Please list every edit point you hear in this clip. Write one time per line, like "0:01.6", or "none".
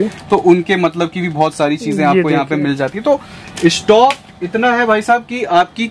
none